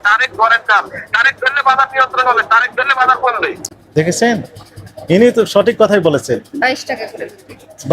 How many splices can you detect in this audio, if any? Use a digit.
1